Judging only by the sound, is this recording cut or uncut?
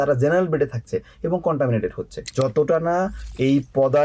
cut